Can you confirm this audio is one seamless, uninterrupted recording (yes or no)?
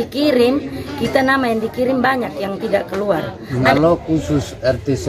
no